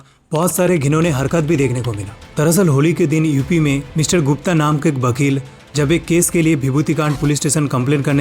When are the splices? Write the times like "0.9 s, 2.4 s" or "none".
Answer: none